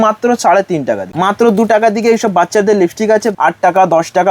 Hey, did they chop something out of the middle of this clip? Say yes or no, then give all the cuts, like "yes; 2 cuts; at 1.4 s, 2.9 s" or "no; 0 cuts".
yes; 2 cuts; at 1.1 s, 3.3 s